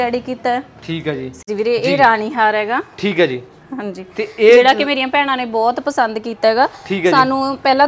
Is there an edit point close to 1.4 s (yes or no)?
yes